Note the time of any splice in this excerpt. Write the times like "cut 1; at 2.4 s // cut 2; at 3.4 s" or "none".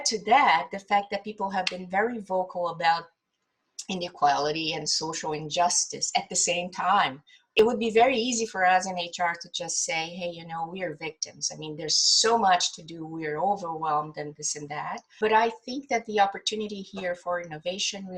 cut 1; at 7.6 s // cut 2; at 15.1 s